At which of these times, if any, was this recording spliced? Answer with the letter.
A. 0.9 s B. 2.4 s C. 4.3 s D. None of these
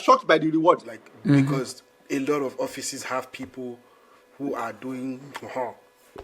A